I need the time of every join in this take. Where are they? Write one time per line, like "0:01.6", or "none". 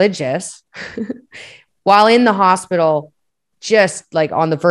none